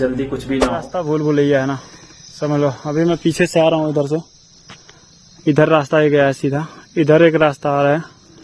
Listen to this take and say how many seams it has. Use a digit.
1